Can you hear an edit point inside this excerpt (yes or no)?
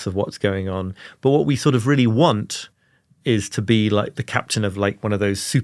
no